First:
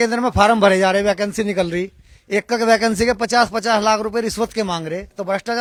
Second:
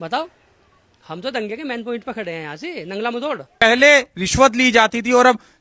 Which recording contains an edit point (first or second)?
second